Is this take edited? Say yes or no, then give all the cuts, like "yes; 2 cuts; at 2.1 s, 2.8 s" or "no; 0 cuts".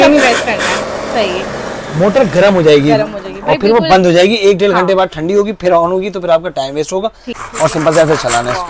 yes; 1 cut; at 7.4 s